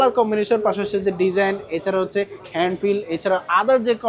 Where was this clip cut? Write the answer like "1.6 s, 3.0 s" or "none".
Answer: none